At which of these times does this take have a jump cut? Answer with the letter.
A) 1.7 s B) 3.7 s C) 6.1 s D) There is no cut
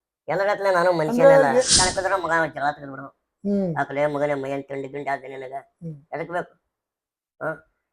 A